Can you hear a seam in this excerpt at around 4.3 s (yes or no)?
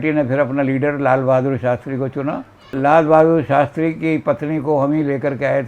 no